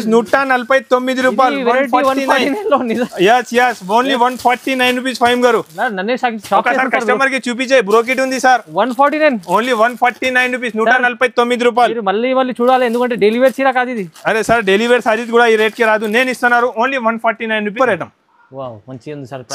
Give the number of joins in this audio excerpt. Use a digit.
1